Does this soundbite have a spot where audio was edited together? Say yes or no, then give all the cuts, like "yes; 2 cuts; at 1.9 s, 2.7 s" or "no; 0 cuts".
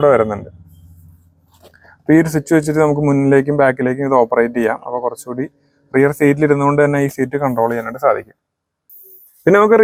no; 0 cuts